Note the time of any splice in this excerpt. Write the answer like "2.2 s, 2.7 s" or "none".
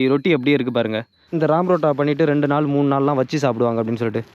1.2 s